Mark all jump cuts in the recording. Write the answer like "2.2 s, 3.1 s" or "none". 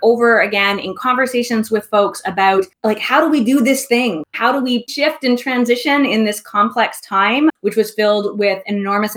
4.3 s